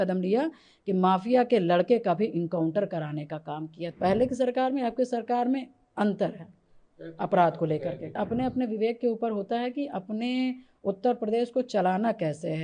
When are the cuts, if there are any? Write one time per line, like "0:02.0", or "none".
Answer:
0:03.8
0:08.2